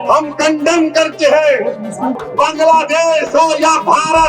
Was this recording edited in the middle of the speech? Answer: yes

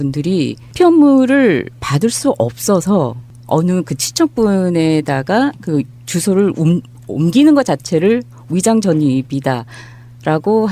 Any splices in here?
no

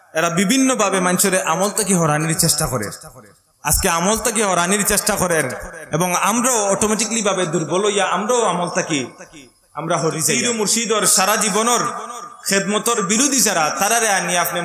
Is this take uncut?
no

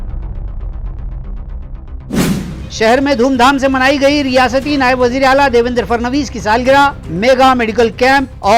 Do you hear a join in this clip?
yes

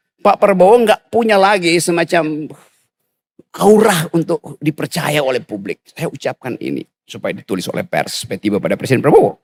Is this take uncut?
yes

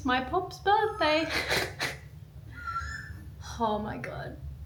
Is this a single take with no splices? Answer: yes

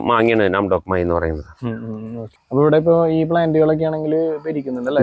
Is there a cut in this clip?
yes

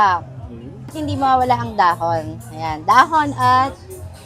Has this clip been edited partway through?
yes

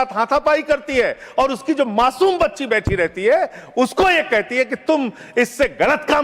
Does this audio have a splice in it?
no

